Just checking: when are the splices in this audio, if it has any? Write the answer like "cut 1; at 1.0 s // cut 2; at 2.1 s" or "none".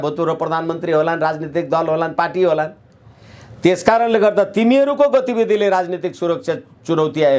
none

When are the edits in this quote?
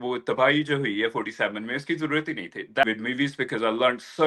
cut 1; at 2.9 s

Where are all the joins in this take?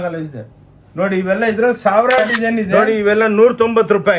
cut 1; at 2.7 s

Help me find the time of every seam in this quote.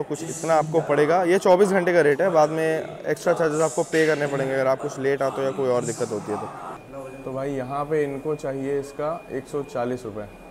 cut 1; at 6.9 s

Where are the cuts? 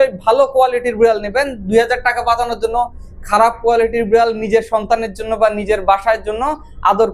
none

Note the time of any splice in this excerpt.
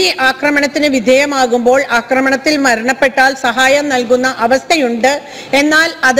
none

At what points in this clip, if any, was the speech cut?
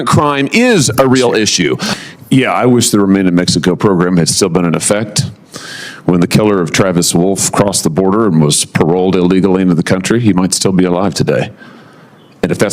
cut 1; at 1.9 s

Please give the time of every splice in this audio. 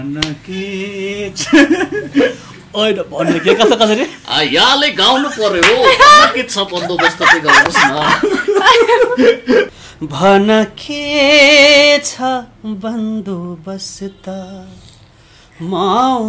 cut 1; at 9.8 s

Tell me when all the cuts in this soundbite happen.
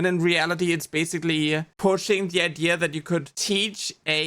cut 1; at 1.7 s // cut 2; at 3.3 s

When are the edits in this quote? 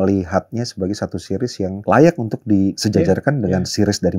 cut 1; at 1.8 s // cut 2; at 2.8 s

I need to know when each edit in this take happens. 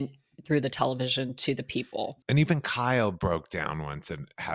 cut 1; at 2.2 s

